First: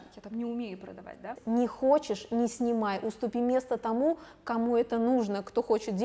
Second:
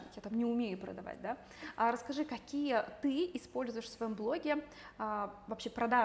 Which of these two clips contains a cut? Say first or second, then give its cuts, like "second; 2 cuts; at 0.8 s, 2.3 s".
first; 1 cut; at 1.4 s